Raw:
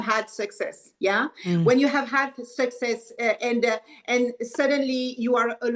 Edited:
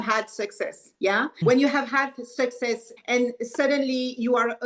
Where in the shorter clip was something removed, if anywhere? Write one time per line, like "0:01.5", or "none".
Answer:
0:01.4
0:02.9